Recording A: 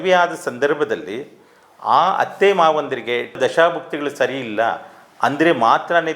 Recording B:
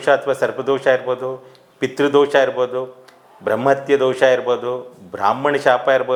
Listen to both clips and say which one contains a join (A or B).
A